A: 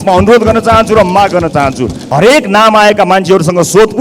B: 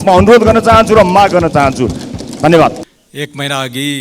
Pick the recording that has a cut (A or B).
A